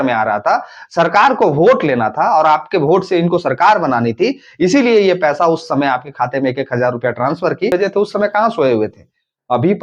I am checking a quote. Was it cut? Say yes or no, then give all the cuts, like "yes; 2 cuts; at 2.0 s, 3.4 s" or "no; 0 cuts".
yes; 1 cut; at 7.7 s